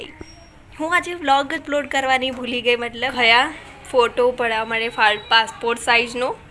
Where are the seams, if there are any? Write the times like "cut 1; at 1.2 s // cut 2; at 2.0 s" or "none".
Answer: cut 1; at 3.1 s

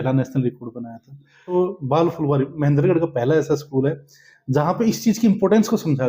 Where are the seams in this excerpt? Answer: cut 1; at 1.5 s

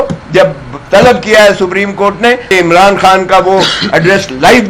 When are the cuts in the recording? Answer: cut 1; at 2.5 s

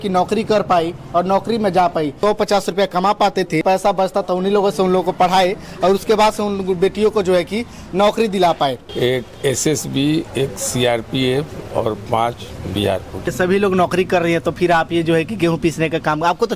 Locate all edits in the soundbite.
cut 1; at 2.2 s // cut 2; at 3.6 s // cut 3; at 8.8 s // cut 4; at 13.3 s

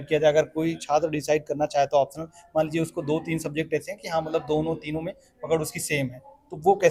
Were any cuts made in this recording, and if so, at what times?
none

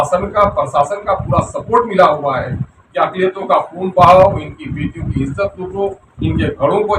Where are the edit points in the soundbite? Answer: none

